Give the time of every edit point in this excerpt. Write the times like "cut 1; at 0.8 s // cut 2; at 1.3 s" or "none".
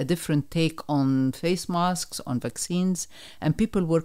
none